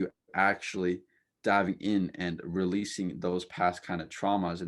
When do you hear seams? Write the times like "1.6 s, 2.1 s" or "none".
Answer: none